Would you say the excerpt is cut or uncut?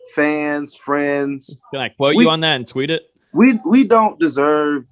uncut